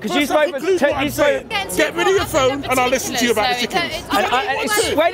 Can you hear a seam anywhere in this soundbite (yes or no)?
yes